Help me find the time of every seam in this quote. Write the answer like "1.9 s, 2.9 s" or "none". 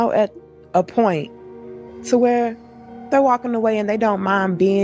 none